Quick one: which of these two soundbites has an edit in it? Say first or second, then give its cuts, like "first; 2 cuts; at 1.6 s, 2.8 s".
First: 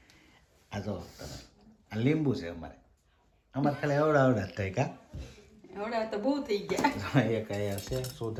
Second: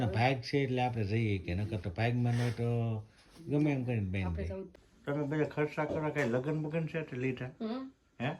second; 1 cut; at 4.7 s